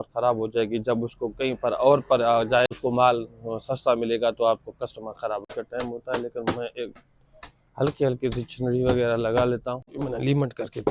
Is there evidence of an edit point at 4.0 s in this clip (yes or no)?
no